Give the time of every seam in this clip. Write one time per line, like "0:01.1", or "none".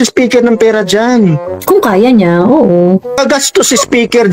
0:01.5
0:03.2